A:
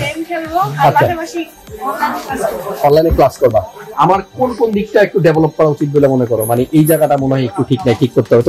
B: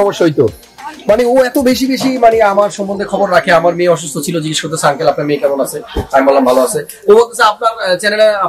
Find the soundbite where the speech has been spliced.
A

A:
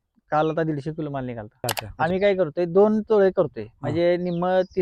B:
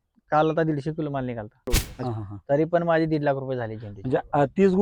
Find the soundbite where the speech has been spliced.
B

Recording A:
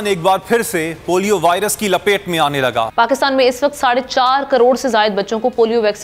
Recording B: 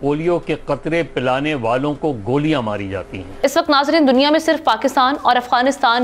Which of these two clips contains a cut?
B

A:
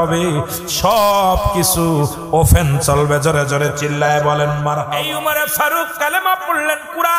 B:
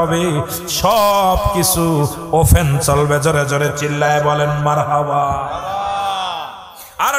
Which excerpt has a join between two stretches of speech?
A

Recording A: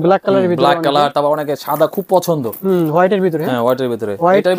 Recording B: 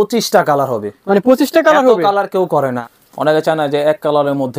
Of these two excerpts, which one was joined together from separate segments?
B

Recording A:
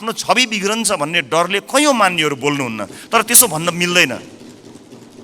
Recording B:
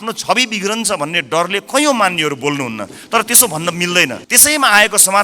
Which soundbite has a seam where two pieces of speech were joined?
B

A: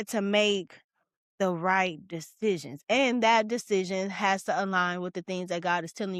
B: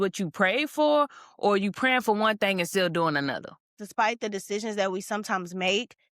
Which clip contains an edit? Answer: B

